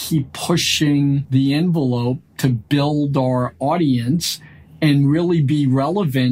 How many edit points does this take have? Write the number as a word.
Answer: one